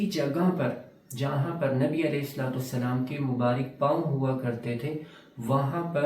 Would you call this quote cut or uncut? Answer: uncut